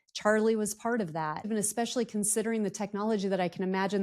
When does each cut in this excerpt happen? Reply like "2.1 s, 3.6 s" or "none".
1.4 s